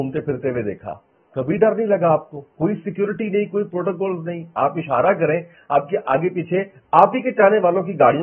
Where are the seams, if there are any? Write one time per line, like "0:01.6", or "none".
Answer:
none